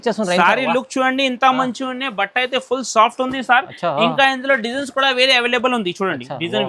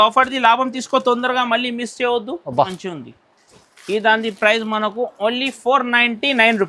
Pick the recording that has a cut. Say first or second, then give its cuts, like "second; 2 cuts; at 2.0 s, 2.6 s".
second; 1 cut; at 2.7 s